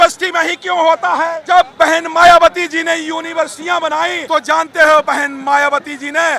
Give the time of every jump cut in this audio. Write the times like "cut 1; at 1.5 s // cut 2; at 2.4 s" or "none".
cut 1; at 1.4 s // cut 2; at 4.2 s